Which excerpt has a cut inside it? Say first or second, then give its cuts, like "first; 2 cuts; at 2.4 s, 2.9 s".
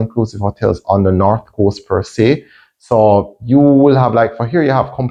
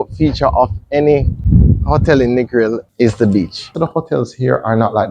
second; 3 cuts; at 1.4 s, 2.9 s, 3.7 s